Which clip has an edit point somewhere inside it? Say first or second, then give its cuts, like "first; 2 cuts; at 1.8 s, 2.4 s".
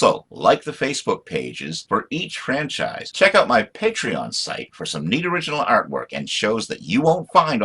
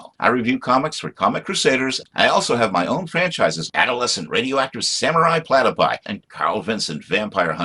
first; 1 cut; at 3.0 s